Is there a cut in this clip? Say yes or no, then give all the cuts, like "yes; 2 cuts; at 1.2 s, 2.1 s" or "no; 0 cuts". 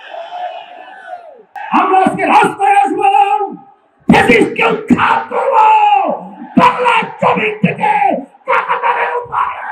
yes; 1 cut; at 1.6 s